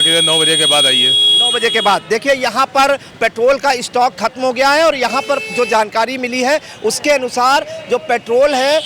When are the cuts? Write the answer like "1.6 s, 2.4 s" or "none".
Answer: none